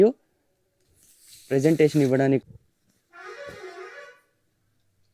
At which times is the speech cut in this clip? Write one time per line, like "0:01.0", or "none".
0:02.4